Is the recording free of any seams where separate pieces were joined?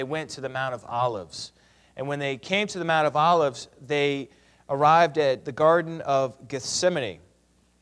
no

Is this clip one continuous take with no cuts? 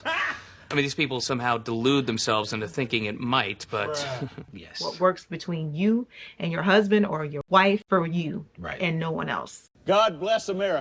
no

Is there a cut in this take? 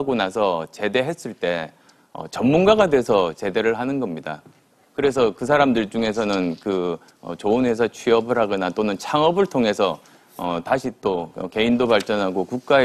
yes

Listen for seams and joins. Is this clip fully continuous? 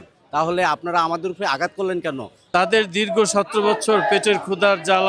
no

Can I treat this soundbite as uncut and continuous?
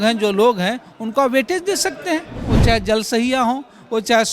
no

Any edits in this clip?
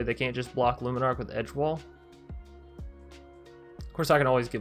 no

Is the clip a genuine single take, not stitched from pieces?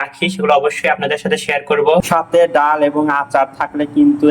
no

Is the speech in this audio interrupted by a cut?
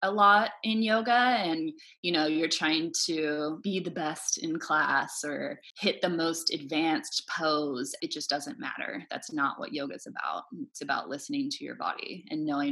yes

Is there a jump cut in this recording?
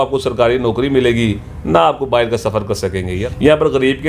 yes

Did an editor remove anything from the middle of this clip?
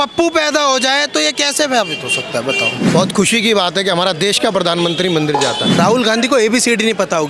yes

